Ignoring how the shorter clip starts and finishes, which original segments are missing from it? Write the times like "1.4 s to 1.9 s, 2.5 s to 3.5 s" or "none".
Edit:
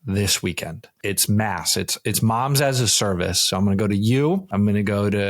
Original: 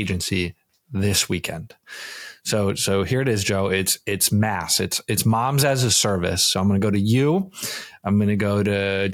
1.8 s to 4.0 s, 7.5 s to 8.0 s